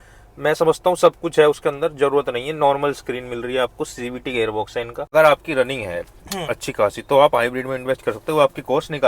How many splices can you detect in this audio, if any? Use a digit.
1